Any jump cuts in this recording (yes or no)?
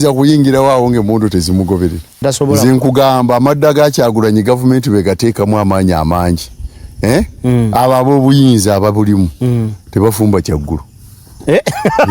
yes